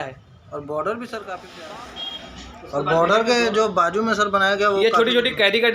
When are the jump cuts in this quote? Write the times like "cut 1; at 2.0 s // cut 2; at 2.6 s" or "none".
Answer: cut 1; at 1.4 s